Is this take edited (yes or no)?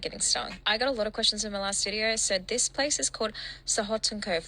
no